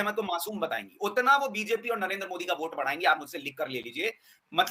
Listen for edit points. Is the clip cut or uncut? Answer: uncut